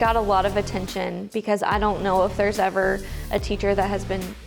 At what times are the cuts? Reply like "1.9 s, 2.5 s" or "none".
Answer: 1.3 s